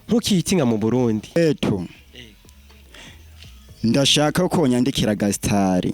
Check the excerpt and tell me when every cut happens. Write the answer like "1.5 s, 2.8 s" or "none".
1.4 s